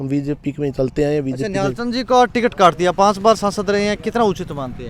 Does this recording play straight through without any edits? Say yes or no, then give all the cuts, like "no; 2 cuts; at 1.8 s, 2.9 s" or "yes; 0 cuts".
yes; 0 cuts